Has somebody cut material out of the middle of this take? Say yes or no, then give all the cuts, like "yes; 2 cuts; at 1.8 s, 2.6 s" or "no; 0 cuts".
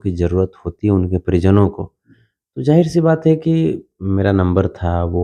no; 0 cuts